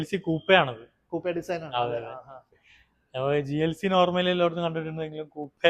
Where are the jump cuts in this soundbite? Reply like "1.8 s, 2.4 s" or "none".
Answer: none